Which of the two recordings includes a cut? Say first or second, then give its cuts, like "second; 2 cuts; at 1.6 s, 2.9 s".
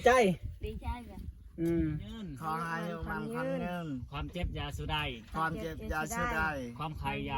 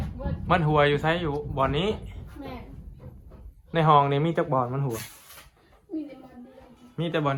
first; 1 cut; at 2.3 s